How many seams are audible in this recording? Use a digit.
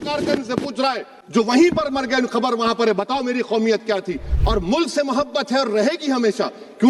1